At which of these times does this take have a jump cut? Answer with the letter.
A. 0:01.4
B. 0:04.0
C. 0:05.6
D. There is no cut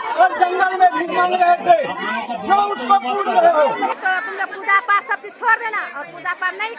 B